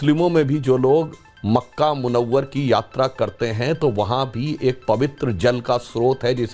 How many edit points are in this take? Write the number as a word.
zero